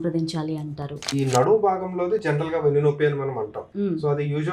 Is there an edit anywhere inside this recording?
yes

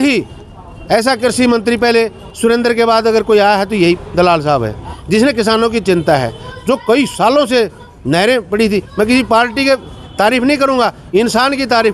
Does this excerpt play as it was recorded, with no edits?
yes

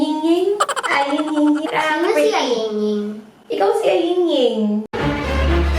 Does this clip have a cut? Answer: yes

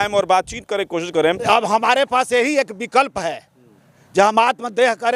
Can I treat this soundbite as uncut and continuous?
no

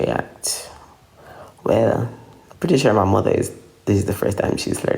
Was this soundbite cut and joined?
no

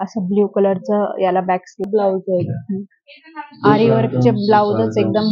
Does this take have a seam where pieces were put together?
yes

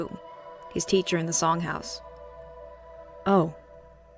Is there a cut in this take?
no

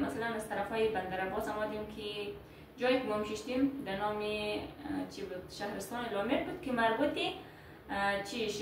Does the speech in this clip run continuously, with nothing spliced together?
yes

